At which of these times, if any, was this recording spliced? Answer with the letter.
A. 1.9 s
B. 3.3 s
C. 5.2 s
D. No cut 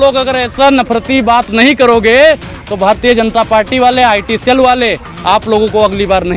D